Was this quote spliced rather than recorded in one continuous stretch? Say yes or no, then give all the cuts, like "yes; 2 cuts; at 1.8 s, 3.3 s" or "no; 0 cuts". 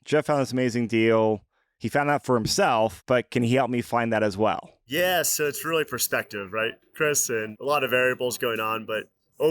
yes; 3 cuts; at 3.0 s, 4.8 s, 7.5 s